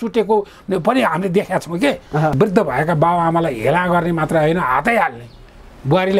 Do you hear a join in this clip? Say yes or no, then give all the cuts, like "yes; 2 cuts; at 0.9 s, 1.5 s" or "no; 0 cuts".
yes; 1 cut; at 2.3 s